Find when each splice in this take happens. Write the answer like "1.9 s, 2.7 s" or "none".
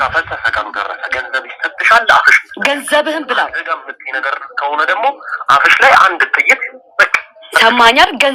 none